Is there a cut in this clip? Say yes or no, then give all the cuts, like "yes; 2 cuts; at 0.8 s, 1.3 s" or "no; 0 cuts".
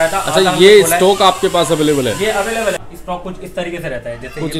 yes; 1 cut; at 2.8 s